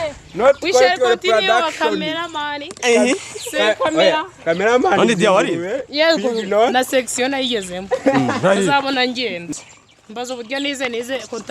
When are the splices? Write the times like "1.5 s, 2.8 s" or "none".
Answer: 9.5 s

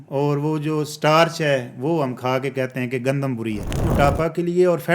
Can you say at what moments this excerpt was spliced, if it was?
3.8 s

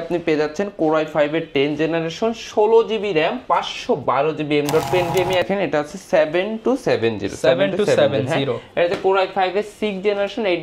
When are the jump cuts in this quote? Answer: 5.4 s

